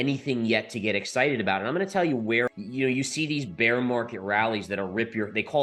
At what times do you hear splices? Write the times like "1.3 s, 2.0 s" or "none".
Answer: 2.5 s